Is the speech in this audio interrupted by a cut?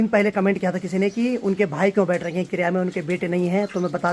no; 0 cuts

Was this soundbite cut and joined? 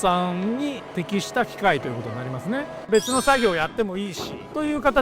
yes; 1 cut; at 2.8 s

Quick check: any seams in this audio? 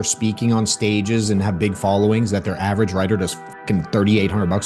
no; 0 cuts

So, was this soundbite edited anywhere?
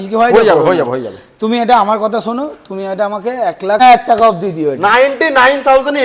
yes; 1 cut; at 3.8 s

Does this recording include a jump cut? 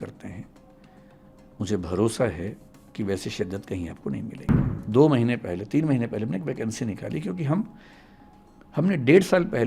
yes; 1 cut; at 4.5 s

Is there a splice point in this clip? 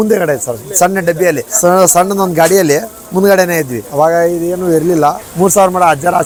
no; 0 cuts

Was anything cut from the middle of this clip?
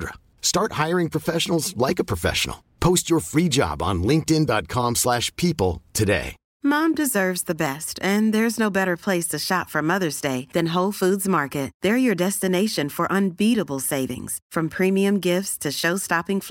yes; 1 cut; at 6.4 s

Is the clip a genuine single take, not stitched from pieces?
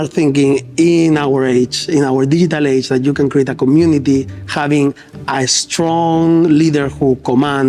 yes; 0 cuts

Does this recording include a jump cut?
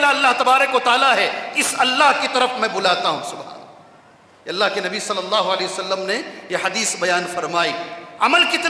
no; 0 cuts

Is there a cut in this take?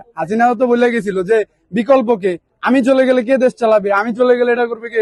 no; 0 cuts

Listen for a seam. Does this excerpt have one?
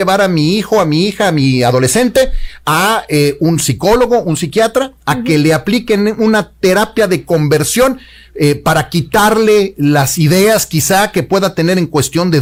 no; 0 cuts

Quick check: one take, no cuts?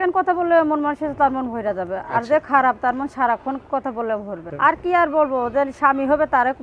no; 1 cut; at 4.4 s

